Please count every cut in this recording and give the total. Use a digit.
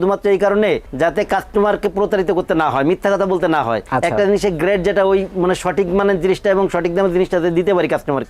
0